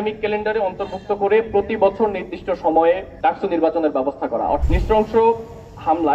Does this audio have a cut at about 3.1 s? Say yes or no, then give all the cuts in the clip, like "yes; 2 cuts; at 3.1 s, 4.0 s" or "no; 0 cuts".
no; 1 cut; at 4.6 s